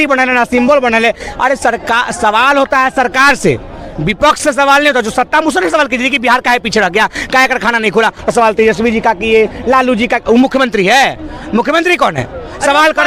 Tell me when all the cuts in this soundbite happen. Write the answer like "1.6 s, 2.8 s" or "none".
none